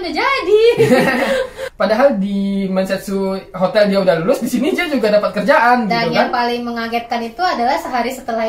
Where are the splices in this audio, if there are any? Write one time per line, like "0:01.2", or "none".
0:01.6